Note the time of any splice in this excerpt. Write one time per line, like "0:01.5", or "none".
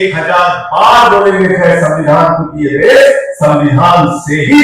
none